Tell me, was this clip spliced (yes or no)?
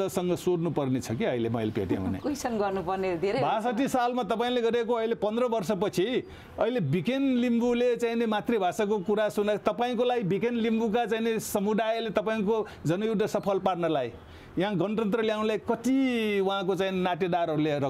no